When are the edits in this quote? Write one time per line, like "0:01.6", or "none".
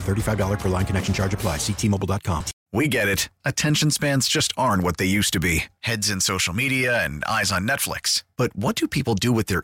0:02.6